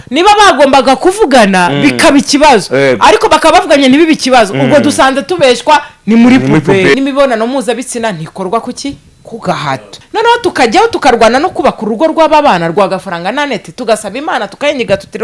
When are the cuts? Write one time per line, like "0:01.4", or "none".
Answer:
0:06.9
0:09.9